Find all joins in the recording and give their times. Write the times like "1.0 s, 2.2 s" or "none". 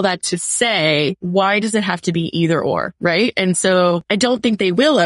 1.2 s, 2.9 s, 4.0 s